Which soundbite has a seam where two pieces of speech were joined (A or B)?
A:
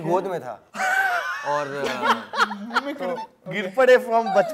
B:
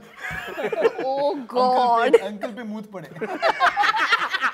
A